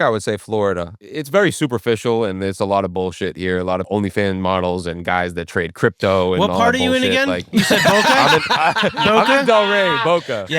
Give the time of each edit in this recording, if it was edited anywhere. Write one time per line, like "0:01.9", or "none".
0:00.9
0:03.9